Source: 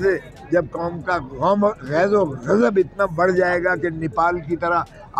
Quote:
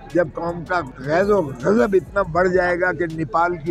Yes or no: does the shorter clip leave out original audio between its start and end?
yes